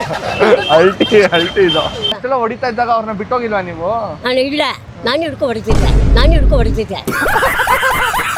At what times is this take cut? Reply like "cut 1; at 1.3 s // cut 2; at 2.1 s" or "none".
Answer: none